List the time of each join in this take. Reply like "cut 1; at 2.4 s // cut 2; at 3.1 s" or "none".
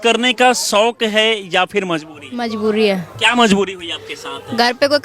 none